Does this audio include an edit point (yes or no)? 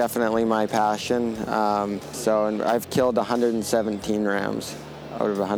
yes